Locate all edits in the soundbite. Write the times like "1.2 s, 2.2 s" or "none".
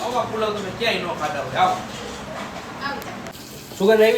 3.3 s